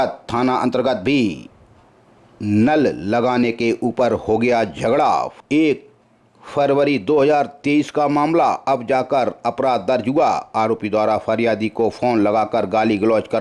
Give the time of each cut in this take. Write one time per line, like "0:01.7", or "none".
0:05.3